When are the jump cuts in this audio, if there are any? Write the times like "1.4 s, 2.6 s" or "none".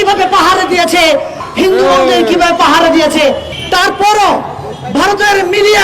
1.4 s, 3.5 s